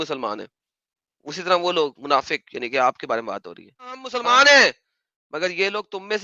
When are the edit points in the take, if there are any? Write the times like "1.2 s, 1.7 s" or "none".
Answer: 4.1 s